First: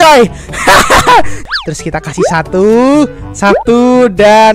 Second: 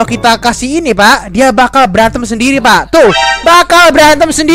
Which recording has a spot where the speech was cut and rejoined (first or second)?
first